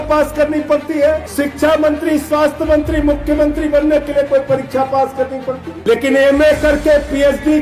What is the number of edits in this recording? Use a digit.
2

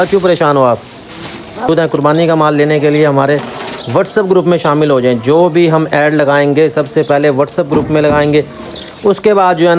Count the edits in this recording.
1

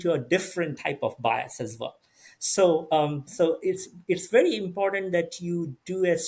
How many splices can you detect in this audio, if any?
0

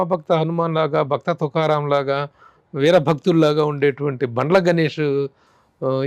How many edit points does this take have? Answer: 0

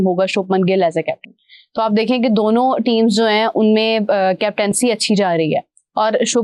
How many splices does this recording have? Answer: 0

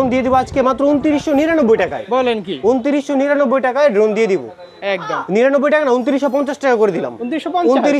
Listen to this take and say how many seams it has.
0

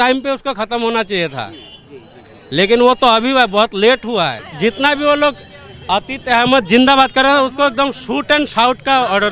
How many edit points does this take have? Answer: 1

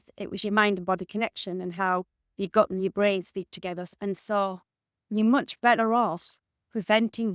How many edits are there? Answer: 1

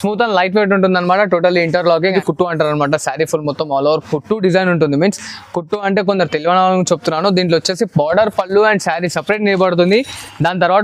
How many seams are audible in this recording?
1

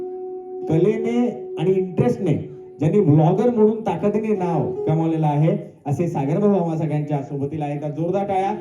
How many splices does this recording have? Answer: 0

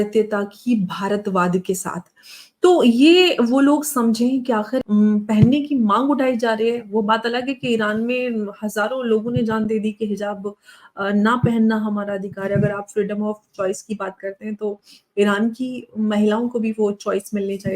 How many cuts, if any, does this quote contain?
1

